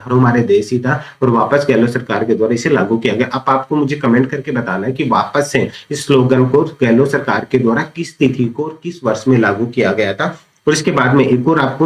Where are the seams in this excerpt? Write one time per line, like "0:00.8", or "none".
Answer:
none

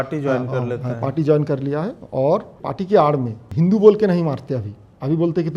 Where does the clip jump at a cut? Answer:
0:02.6
0:03.4

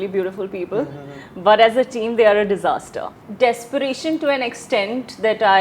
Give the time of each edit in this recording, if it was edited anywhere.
0:03.2

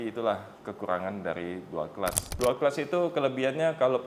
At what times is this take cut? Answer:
0:02.2

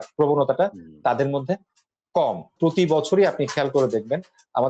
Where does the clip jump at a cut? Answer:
0:02.5

